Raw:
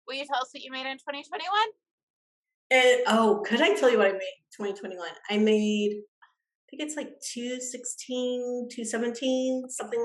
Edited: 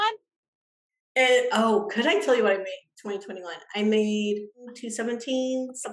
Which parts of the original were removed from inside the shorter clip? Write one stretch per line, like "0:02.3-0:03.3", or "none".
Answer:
0:06.3-0:08.7